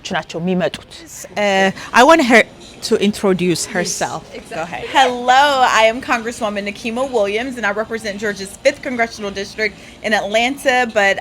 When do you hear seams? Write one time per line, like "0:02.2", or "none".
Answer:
0:01.4